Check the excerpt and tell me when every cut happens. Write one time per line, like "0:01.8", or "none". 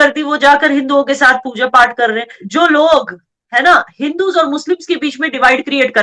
0:02.4